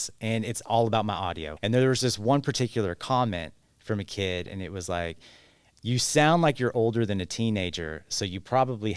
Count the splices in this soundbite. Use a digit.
1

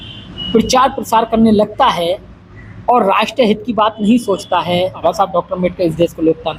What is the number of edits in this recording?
1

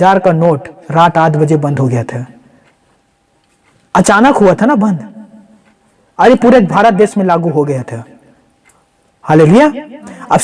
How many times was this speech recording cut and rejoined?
0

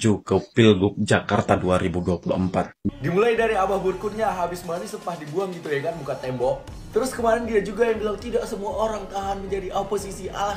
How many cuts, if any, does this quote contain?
1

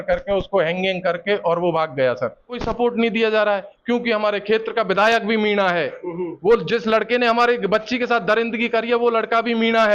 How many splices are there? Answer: 1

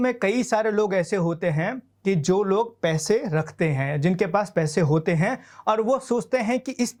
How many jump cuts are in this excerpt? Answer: 0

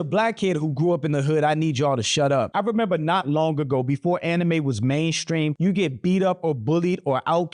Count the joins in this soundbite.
0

